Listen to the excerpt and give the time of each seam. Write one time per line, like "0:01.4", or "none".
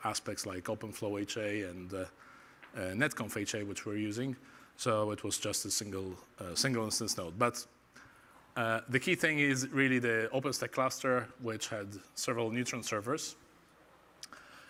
none